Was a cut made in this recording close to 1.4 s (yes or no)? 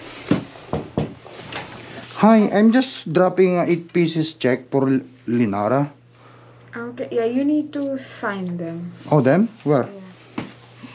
yes